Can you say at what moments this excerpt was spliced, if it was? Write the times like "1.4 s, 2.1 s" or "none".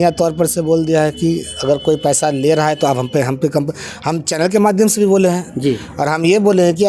none